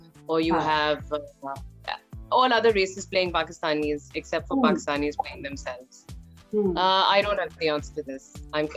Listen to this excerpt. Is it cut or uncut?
uncut